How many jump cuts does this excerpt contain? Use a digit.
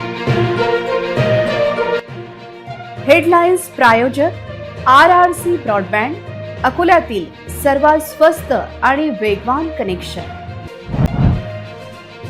1